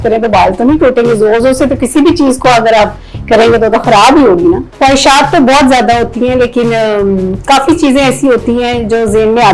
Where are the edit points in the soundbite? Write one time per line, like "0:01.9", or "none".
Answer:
0:04.7